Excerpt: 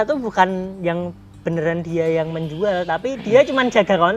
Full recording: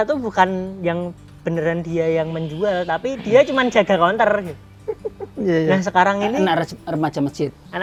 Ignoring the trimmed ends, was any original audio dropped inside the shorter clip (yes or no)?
no